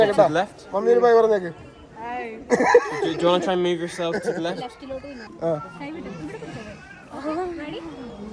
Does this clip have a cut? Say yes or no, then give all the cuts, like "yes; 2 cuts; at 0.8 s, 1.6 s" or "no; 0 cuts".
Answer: yes; 1 cut; at 5.3 s